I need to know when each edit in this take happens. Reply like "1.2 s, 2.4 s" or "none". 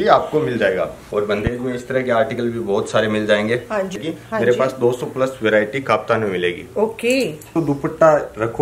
1.0 s, 3.9 s, 7.5 s